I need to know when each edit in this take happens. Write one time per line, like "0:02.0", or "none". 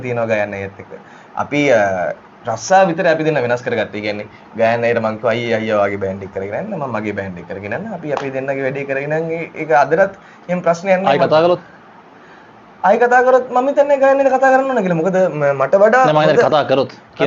none